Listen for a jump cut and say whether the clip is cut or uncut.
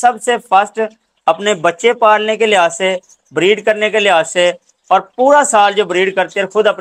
uncut